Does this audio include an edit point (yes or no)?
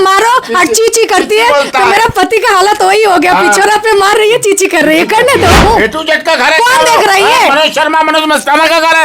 yes